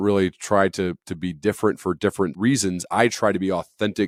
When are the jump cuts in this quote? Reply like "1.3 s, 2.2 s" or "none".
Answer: none